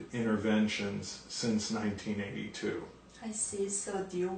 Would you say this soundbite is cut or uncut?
uncut